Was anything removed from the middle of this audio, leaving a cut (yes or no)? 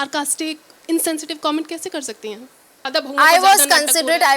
yes